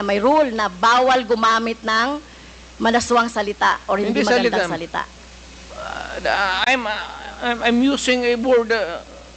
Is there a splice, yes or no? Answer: no